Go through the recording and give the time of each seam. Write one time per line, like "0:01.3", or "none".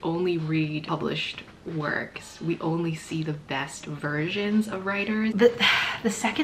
0:05.3